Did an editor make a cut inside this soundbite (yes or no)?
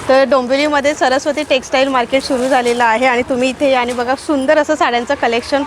no